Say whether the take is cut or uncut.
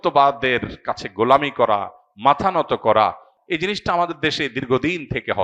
cut